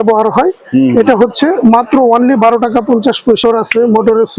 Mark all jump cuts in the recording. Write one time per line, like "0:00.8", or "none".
0:03.4